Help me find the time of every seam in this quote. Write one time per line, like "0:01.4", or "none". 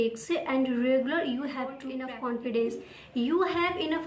0:01.9